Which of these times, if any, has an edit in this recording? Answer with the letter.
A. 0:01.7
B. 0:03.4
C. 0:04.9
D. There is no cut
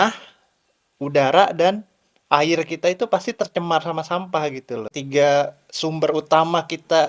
C